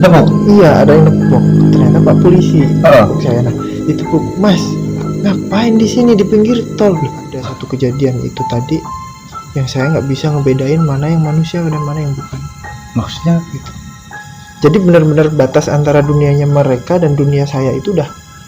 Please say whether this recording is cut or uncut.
cut